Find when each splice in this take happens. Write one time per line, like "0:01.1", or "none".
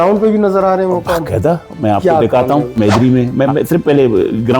0:02.8